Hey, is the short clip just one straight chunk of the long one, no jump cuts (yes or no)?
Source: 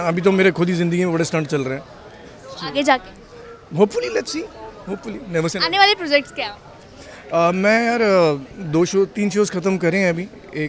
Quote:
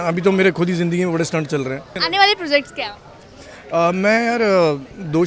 no